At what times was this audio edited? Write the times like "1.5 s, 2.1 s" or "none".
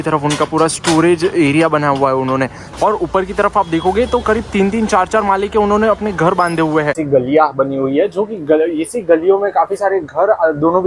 2.6 s, 7.0 s